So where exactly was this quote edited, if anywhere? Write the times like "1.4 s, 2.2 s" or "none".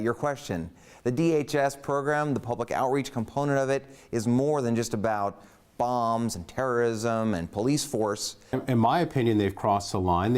8.3 s